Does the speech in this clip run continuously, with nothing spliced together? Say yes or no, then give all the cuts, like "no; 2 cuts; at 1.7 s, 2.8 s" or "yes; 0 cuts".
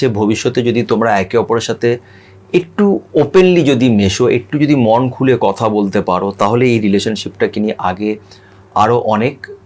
yes; 0 cuts